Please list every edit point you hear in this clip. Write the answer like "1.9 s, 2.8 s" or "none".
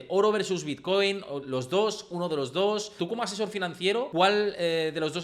2.9 s, 4.1 s